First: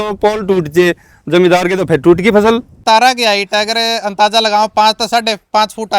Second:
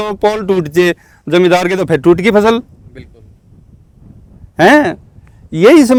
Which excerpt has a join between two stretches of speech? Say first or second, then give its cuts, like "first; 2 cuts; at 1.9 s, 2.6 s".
first; 1 cut; at 2.8 s